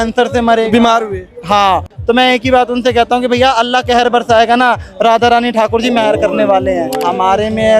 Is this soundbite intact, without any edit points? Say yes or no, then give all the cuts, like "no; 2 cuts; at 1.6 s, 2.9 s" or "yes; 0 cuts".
no; 2 cuts; at 1.9 s, 6.9 s